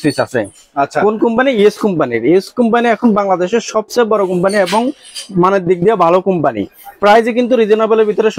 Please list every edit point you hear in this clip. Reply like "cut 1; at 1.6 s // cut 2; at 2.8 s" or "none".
none